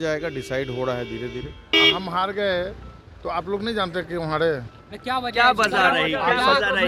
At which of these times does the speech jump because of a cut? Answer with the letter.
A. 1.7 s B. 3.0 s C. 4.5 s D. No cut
A